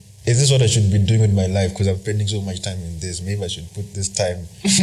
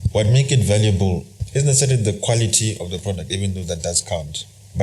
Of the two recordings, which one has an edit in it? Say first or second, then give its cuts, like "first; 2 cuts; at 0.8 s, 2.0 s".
second; 1 cut; at 1.4 s